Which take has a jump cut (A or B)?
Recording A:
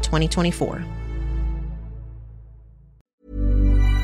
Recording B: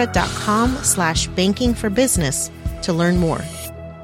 A